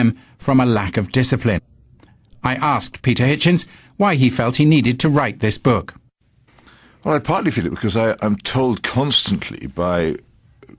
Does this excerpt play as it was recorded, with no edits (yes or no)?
no